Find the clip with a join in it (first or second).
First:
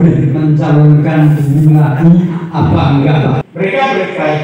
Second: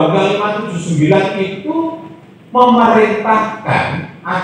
first